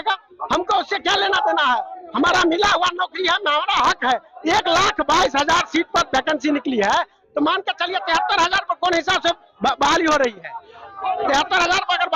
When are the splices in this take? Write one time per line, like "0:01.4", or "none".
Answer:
none